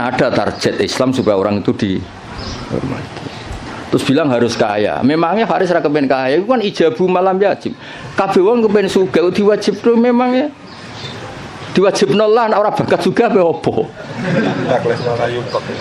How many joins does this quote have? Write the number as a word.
zero